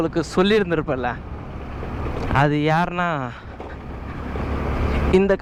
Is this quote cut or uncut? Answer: uncut